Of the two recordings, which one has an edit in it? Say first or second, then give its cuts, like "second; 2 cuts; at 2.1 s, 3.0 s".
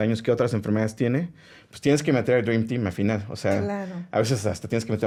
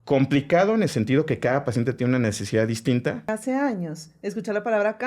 second; 1 cut; at 3.4 s